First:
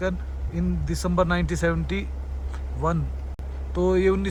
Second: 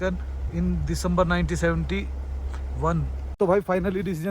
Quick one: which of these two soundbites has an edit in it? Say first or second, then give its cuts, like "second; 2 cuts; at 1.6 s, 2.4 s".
second; 1 cut; at 3.2 s